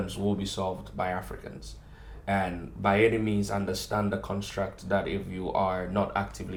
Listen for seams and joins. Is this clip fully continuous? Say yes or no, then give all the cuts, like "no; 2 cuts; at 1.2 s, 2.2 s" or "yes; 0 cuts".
yes; 0 cuts